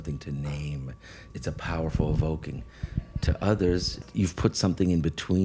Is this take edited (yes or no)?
yes